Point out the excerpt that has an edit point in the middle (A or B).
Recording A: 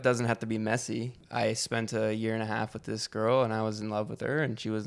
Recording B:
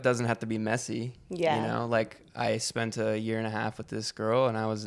A